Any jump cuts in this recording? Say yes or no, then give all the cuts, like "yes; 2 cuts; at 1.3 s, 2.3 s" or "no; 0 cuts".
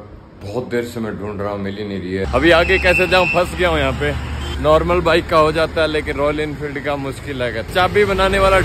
yes; 3 cuts; at 2.2 s, 4.4 s, 7.7 s